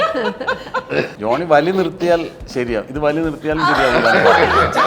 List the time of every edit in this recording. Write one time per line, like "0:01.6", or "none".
0:01.1